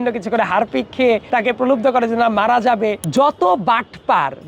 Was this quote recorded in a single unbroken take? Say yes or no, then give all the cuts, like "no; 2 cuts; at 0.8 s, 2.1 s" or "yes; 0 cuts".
no; 2 cuts; at 1.2 s, 3.0 s